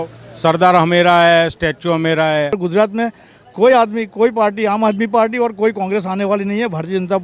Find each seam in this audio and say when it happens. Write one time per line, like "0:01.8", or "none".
0:02.6